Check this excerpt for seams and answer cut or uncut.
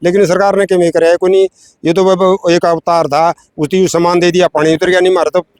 uncut